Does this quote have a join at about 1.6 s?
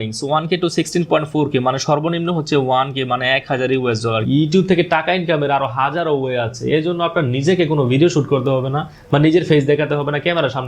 no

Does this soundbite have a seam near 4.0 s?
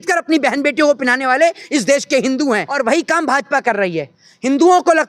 no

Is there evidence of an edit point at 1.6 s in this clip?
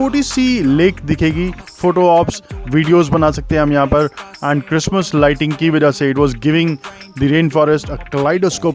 yes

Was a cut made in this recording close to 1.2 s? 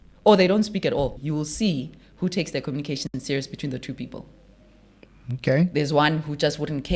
yes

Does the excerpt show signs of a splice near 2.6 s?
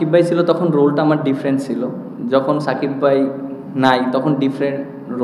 no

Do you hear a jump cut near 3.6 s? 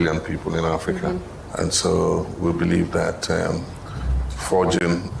no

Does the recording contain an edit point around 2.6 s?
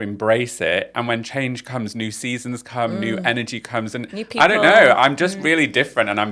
no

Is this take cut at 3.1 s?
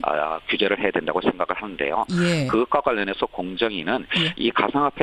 no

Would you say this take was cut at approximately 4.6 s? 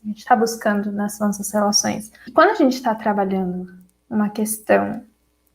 no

